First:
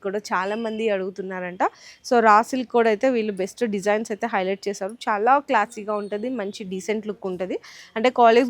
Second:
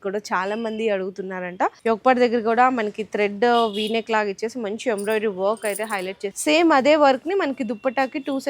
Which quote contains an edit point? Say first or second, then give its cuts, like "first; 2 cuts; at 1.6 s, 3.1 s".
second; 2 cuts; at 1.8 s, 6.3 s